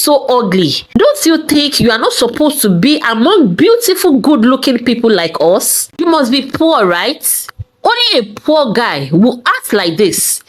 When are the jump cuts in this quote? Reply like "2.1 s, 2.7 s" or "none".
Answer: 5.9 s